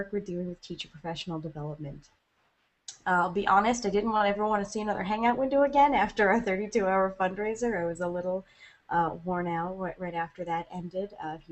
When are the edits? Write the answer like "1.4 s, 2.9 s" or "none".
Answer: 2.1 s